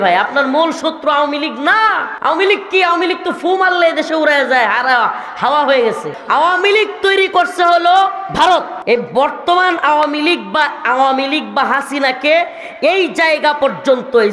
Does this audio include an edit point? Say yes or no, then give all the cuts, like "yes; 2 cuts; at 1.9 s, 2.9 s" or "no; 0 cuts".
yes; 3 cuts; at 2.1 s, 6.1 s, 8.7 s